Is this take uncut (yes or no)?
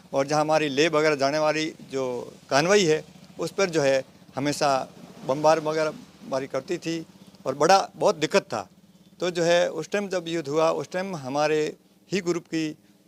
yes